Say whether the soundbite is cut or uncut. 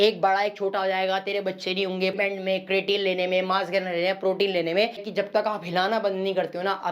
cut